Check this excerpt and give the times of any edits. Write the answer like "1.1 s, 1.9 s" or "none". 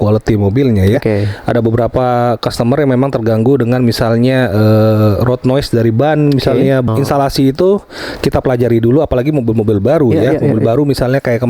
6.9 s